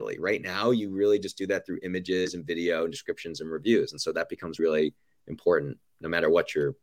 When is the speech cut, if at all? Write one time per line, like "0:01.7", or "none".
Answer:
0:04.6